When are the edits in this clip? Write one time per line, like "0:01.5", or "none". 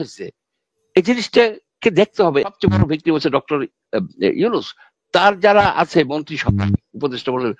0:02.4